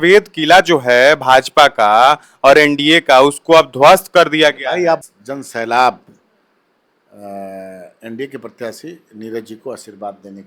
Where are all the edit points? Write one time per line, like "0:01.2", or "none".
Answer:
0:05.2